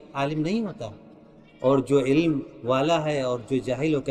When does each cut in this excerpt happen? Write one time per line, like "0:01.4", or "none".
none